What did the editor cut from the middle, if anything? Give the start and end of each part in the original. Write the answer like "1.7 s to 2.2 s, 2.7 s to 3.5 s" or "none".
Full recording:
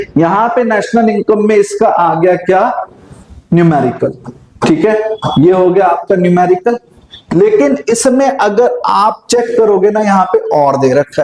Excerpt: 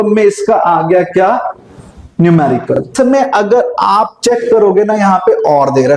4.3 s to 8.0 s